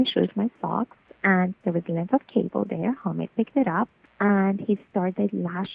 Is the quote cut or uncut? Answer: cut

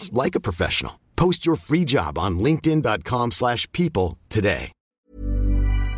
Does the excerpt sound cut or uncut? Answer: cut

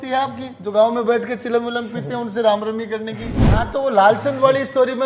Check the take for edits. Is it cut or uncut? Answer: cut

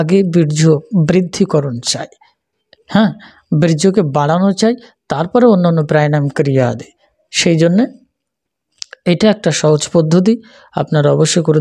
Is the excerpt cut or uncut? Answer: uncut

